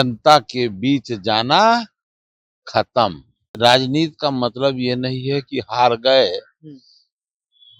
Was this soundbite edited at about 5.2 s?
no; 1 cut; at 3.5 s

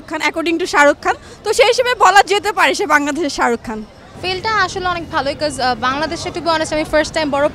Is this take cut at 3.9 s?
no; 0 cuts

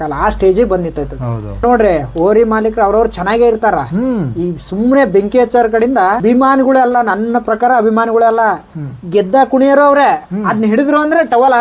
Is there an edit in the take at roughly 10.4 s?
no; 2 cuts; at 1.6 s, 6.2 s

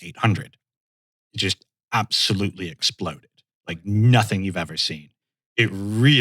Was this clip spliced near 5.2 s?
yes; 1 cut; at 5.2 s

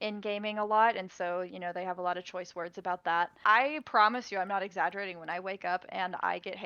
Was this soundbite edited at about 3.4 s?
yes; 1 cut; at 3.4 s

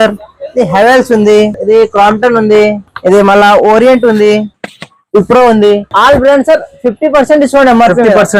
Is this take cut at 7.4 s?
no; 3 cuts; at 1.6 s, 2.9 s, 5.9 s

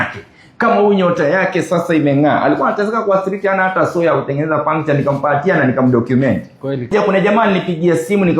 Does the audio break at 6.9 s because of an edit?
yes; 1 cut; at 6.9 s

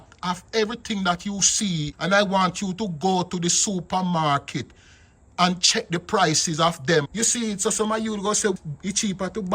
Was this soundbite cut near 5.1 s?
no; 1 cut; at 8.6 s

